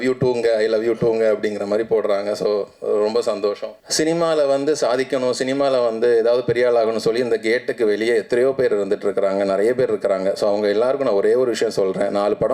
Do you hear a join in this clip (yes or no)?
yes